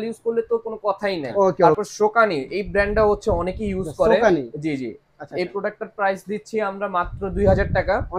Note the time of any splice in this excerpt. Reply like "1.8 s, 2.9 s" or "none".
1.7 s

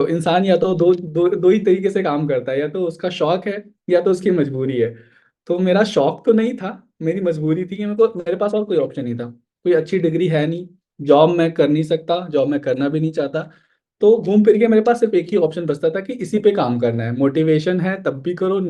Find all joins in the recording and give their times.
none

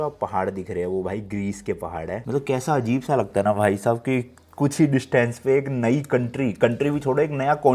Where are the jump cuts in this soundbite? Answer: none

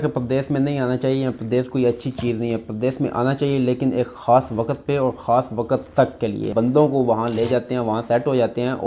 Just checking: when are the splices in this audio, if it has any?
6.5 s

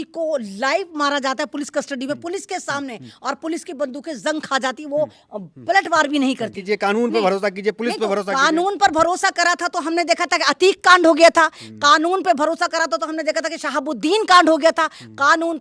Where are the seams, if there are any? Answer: 6.6 s

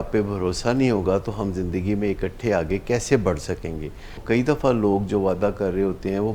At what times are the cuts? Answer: 4.2 s

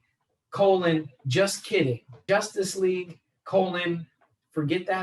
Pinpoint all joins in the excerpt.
2.1 s

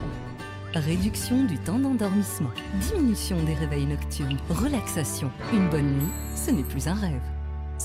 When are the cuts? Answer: none

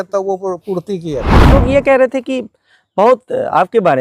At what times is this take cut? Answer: 1.5 s

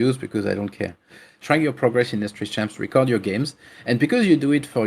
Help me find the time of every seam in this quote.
1.3 s

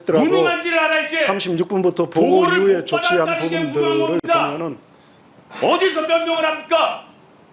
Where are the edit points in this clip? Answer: none

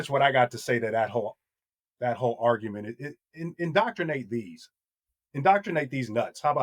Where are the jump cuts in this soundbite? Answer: none

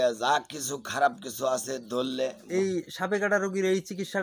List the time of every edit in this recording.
2.5 s

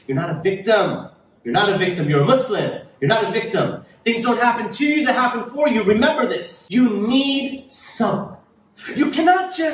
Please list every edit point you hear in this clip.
6.5 s

